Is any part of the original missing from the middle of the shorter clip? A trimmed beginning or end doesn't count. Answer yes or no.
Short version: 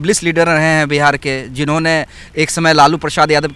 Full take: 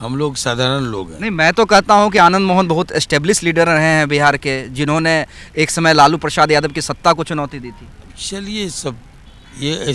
no